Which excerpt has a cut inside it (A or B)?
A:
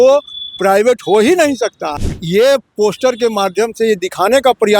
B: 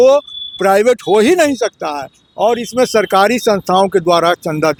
A